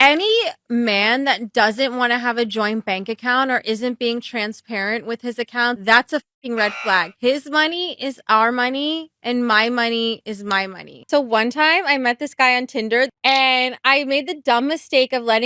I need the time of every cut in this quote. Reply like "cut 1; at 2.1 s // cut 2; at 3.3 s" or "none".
cut 1; at 10.9 s

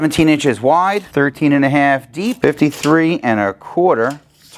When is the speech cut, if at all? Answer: cut 1; at 1.0 s // cut 2; at 2.4 s

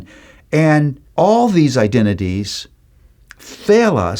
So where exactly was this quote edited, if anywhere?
cut 1; at 1.0 s

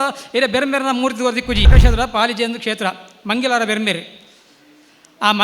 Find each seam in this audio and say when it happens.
cut 1; at 1.7 s

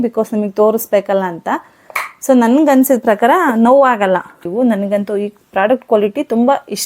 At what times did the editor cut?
cut 1; at 4.5 s

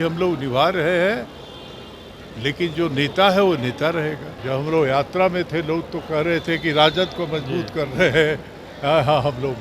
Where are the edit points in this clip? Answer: cut 1; at 4.3 s

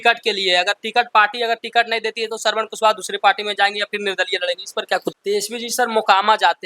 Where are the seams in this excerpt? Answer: cut 1; at 5.1 s

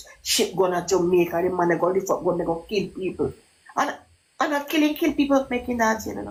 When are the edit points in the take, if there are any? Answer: none

